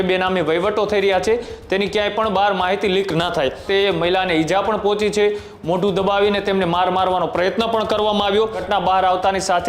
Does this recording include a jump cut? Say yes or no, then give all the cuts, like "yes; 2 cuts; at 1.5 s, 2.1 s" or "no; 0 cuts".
yes; 2 cuts; at 3.6 s, 8.6 s